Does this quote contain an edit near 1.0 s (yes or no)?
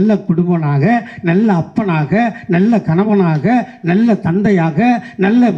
no